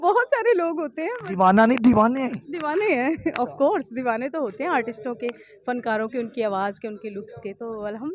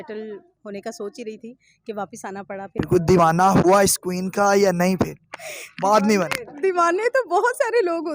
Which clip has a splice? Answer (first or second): second